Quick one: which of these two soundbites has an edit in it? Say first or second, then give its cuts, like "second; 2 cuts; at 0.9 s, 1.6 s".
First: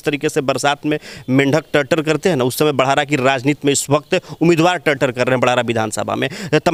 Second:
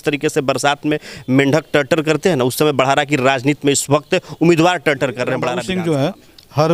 second; 1 cut; at 5.6 s